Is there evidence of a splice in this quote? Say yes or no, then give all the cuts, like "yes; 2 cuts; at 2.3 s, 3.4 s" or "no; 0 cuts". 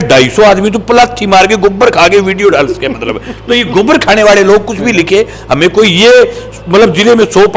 no; 0 cuts